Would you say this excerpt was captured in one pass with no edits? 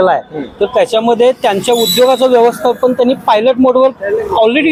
yes; 0 cuts

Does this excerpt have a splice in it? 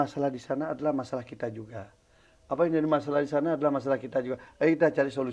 no; 0 cuts

